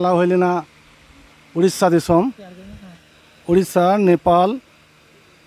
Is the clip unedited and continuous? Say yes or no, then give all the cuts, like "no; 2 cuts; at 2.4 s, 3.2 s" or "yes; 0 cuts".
yes; 0 cuts